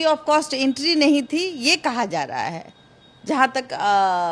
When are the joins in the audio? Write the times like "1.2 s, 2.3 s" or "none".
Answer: none

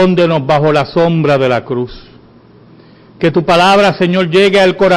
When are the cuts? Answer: 2.6 s

